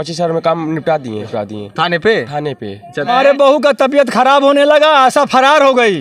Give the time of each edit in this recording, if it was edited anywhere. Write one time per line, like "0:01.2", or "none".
0:01.3
0:03.1